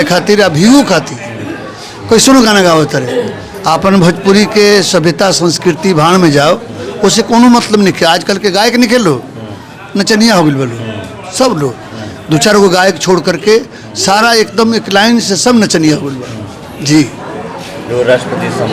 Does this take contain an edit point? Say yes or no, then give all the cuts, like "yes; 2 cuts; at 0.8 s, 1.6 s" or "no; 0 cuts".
no; 0 cuts